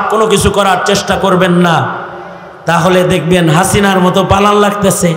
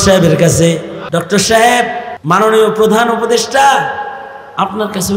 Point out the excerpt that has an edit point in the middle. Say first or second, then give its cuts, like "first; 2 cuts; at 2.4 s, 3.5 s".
second; 2 cuts; at 0.9 s, 2.1 s